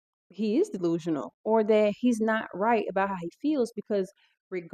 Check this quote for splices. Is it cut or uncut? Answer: uncut